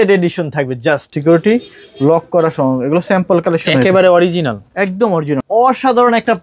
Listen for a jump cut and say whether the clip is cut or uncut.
cut